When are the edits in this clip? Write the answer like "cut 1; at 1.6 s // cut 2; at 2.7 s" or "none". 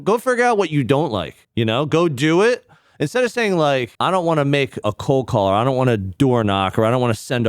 cut 1; at 1.4 s // cut 2; at 3.9 s // cut 3; at 4.8 s